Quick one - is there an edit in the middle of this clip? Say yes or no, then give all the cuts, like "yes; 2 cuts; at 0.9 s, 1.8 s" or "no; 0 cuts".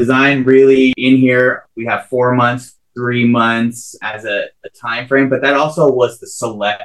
yes; 3 cuts; at 0.9 s, 1.7 s, 4.0 s